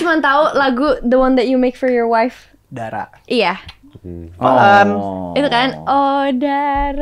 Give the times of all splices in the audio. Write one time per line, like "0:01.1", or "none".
none